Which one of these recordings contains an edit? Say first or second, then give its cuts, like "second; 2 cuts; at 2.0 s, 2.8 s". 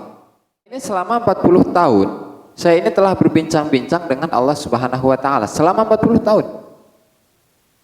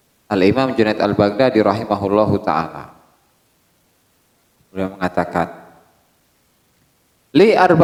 first; 1 cut; at 0.9 s